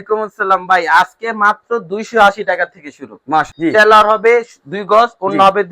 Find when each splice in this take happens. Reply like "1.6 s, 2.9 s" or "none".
3.5 s